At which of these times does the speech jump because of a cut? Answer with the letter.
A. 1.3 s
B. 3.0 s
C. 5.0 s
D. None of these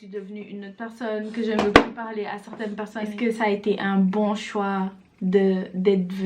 B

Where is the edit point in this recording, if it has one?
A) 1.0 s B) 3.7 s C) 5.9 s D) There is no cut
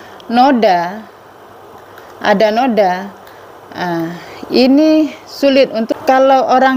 C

